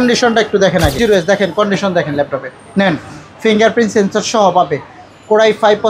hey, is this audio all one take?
no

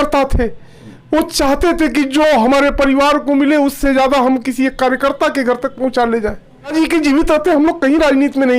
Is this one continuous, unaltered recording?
no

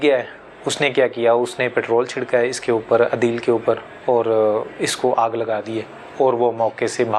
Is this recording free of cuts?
yes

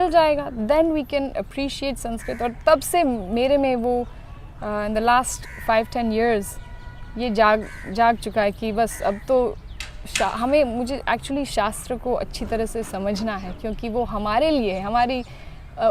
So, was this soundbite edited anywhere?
no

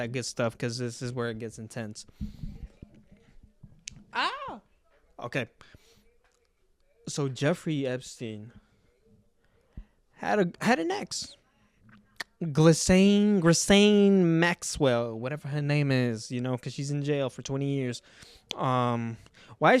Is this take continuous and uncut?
yes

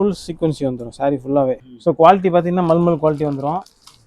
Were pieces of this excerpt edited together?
yes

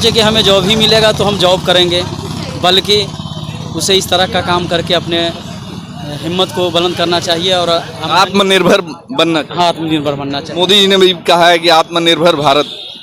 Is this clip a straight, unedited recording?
yes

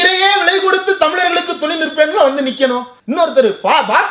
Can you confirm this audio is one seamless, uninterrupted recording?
no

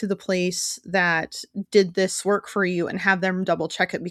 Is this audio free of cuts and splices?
yes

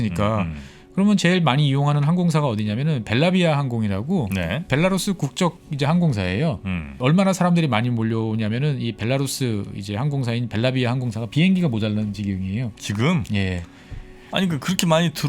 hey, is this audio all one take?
no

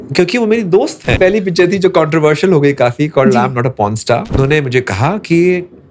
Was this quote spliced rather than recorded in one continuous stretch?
yes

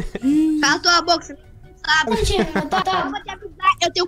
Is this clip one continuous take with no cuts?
no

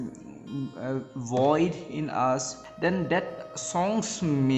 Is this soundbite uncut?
no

